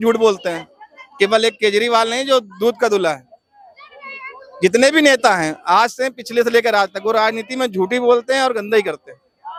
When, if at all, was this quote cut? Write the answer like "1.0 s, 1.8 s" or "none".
none